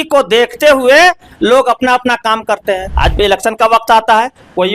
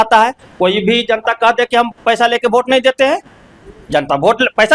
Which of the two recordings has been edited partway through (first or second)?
first